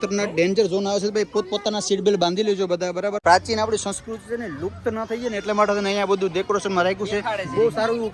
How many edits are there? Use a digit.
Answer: 1